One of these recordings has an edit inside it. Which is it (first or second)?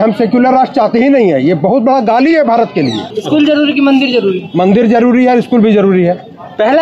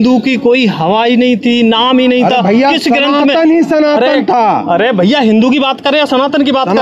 first